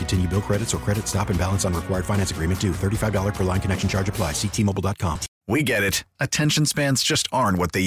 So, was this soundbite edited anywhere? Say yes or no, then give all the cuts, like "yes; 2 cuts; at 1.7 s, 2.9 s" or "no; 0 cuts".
yes; 1 cut; at 5.3 s